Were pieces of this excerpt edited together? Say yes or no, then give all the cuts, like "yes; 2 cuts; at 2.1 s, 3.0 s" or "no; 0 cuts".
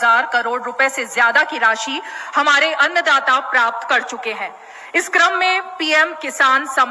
no; 0 cuts